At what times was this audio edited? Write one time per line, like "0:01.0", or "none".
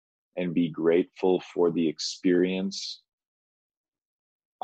none